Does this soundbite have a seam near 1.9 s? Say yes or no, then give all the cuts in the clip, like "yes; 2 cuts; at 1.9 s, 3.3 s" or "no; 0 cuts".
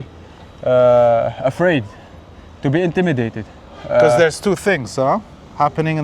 no; 1 cut; at 3.7 s